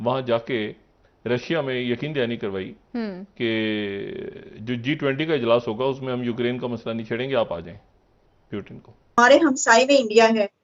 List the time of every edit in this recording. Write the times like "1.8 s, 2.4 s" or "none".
9.2 s